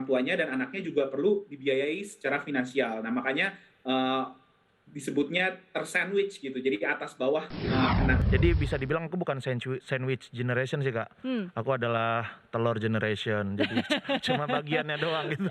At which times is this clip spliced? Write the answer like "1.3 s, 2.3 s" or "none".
8.2 s